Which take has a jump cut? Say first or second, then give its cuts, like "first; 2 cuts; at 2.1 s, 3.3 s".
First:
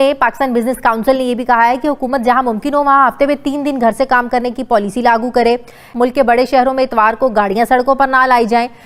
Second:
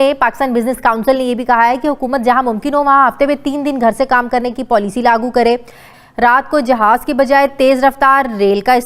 second; 1 cut; at 5.8 s